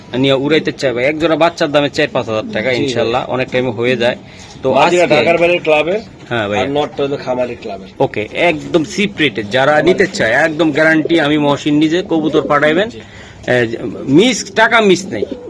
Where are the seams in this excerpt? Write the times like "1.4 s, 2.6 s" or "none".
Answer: none